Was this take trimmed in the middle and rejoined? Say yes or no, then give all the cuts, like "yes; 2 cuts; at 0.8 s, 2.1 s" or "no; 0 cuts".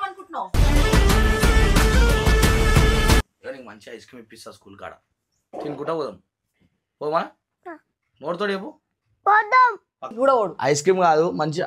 yes; 2 cuts; at 3.2 s, 10.1 s